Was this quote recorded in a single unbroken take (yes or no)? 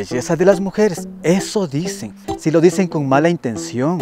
yes